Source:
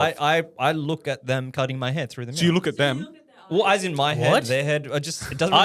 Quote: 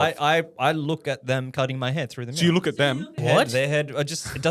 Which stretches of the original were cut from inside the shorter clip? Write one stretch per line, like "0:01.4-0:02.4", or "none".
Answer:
0:03.2-0:04.2